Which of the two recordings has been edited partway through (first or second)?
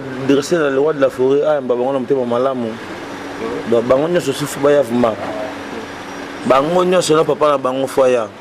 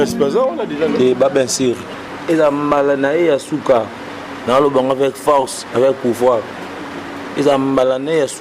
second